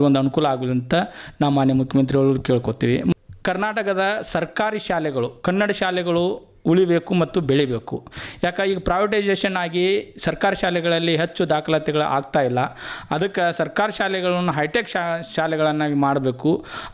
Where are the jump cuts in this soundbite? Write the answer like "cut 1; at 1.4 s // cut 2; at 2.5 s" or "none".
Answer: none